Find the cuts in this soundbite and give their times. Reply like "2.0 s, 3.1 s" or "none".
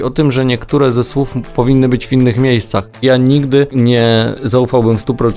3.0 s, 3.7 s

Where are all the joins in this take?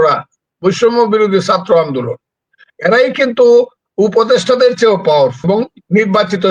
5.4 s

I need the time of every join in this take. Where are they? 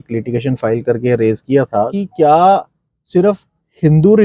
1.9 s

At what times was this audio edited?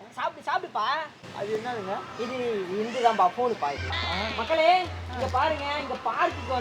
none

